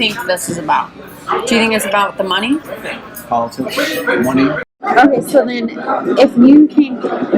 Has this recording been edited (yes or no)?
yes